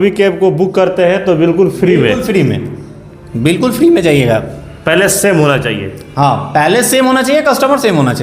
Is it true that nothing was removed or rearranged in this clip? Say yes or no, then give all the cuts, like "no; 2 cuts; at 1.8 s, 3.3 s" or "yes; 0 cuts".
yes; 0 cuts